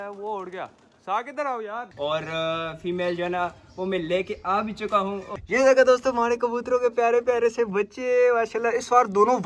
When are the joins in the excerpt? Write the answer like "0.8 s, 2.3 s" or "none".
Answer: 1.9 s, 5.3 s